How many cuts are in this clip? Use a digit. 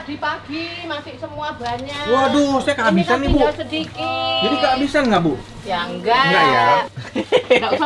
1